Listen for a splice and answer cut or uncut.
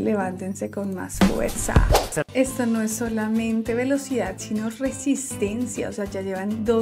cut